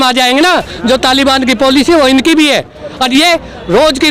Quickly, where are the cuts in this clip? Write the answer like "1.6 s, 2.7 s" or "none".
2.8 s